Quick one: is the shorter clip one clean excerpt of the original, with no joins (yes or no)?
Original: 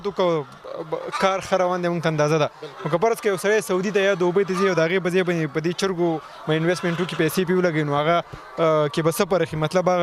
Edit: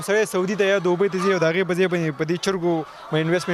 yes